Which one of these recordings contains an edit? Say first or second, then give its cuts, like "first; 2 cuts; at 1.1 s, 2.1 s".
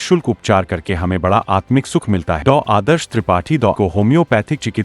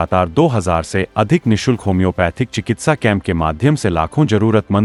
first; 2 cuts; at 2.4 s, 3.8 s